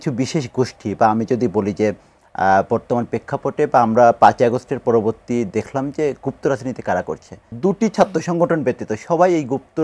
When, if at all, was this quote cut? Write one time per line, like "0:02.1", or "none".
0:07.5